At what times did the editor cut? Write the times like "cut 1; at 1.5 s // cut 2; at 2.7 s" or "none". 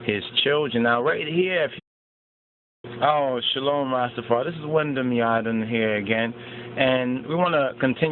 none